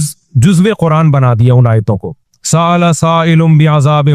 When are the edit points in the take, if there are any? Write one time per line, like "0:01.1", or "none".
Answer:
none